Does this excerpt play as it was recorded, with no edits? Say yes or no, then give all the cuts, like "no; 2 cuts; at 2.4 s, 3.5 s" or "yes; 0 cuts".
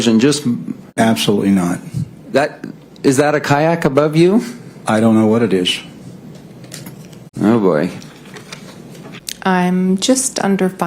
no; 3 cuts; at 0.9 s, 7.2 s, 9.2 s